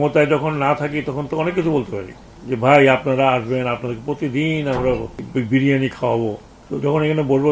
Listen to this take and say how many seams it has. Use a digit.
1